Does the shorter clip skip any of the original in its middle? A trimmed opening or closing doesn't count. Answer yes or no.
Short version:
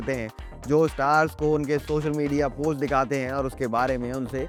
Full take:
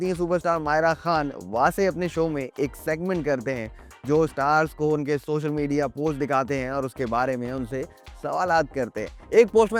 no